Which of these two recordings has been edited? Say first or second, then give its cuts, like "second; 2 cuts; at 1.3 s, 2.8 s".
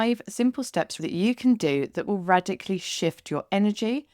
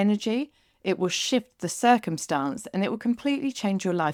first; 1 cut; at 1.0 s